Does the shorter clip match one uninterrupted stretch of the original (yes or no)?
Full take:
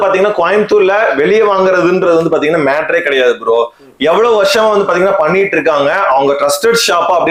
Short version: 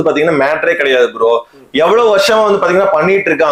yes